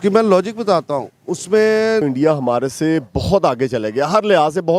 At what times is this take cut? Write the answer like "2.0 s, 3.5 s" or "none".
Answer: 2.0 s